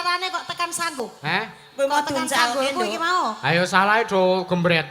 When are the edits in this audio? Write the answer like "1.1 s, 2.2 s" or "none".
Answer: 1.0 s